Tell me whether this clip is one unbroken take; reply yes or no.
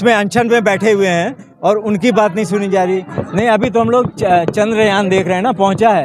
no